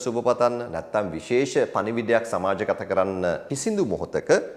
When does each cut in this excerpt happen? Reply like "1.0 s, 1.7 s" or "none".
3.5 s

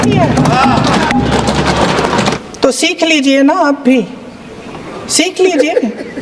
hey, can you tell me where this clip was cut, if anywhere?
2.4 s

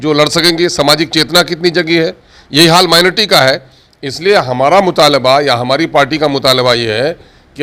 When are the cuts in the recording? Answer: none

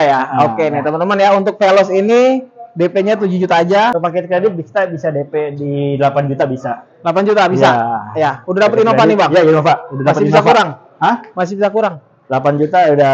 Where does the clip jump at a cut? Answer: 4.0 s

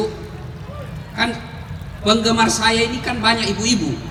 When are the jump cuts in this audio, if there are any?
none

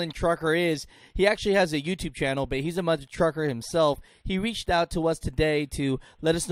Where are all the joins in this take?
none

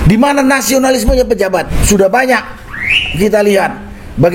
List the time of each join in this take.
1.8 s

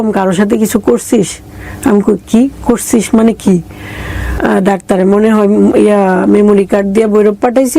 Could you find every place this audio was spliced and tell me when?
4.3 s

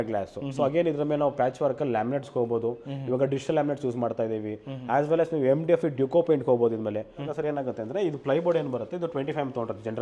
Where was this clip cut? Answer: 7.3 s

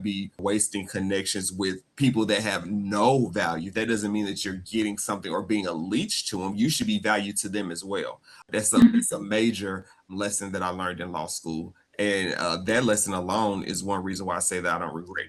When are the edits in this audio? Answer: 8.4 s, 10.1 s

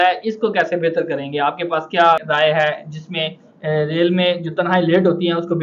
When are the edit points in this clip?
2.2 s

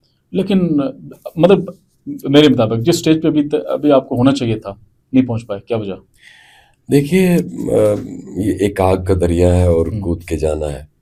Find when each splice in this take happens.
none

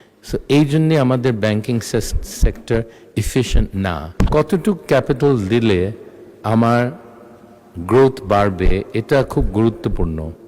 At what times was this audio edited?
4.0 s

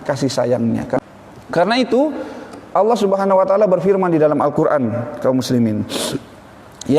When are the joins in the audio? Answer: 1.0 s

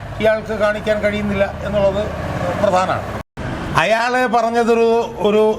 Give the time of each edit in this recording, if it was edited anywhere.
3.2 s

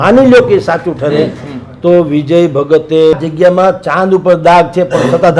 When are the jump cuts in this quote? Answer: 3.1 s

